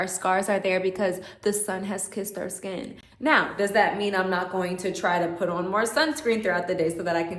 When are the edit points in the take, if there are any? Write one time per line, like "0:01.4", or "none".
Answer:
none